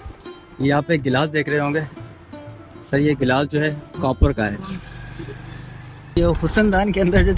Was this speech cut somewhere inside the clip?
yes; 1 cut; at 6.1 s

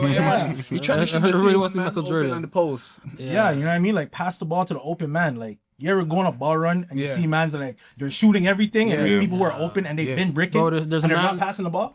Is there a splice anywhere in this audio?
no; 0 cuts

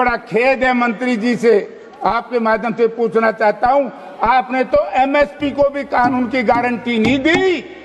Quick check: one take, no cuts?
yes; 0 cuts

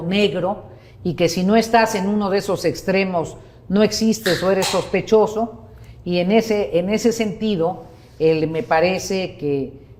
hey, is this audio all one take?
yes; 0 cuts

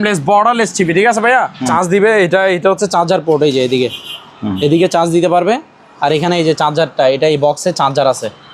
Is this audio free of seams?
no; 1 cut; at 1.6 s

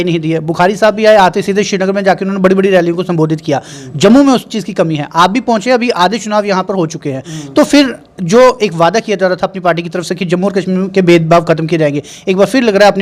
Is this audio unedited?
yes; 0 cuts

